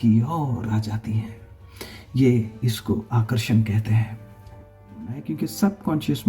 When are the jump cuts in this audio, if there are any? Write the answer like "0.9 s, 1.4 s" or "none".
5.2 s